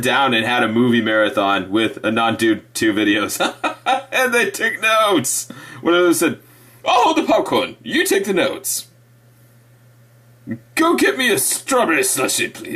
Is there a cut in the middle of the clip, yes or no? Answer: no